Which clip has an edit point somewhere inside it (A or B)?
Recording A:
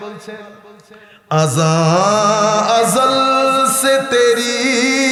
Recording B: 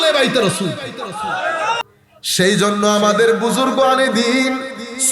B